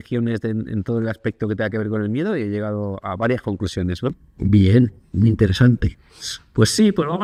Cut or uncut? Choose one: uncut